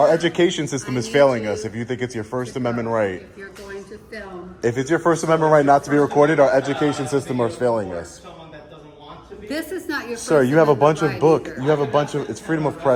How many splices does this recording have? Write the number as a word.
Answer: zero